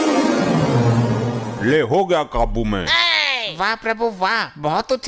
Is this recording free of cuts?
yes; 0 cuts

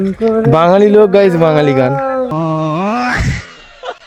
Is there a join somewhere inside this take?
no; 0 cuts

